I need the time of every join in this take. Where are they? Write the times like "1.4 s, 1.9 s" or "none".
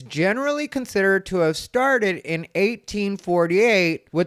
none